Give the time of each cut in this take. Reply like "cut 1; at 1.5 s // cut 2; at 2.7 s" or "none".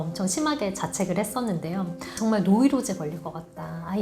cut 1; at 2.1 s